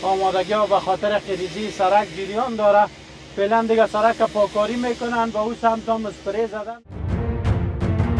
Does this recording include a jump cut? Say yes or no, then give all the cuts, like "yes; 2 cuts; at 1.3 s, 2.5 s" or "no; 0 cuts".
yes; 1 cut; at 6.7 s